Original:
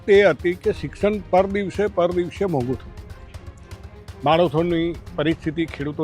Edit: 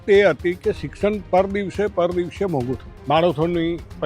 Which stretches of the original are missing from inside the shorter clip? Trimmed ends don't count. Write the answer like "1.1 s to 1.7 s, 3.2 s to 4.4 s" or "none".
2.9 s to 4.1 s